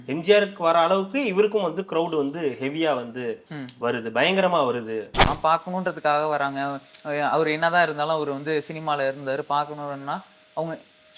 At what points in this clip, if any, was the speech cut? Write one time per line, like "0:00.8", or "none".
0:05.2

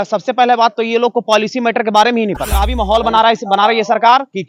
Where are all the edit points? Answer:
0:02.8

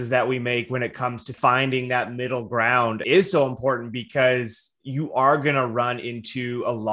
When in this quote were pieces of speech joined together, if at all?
0:01.3
0:03.0

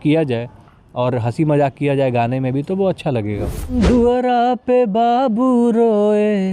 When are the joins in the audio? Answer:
0:03.8

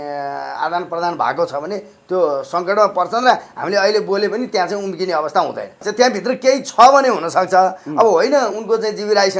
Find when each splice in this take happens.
0:05.8

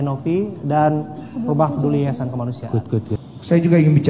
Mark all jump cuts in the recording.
0:03.1

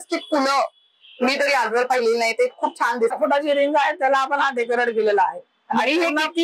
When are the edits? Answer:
0:03.1

